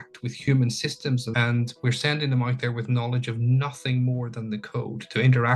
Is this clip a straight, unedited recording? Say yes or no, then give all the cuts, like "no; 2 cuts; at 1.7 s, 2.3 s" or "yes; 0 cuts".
no; 1 cut; at 1.3 s